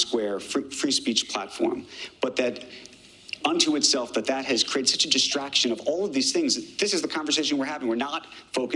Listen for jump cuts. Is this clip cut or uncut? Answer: uncut